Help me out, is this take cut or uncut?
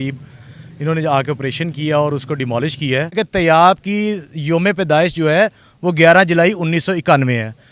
cut